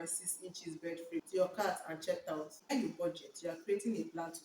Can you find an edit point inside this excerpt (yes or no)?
yes